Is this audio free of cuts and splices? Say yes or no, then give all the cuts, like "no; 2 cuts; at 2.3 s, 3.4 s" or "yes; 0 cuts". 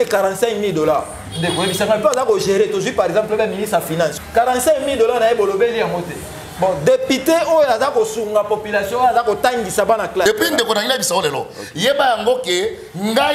no; 2 cuts; at 4.1 s, 10.2 s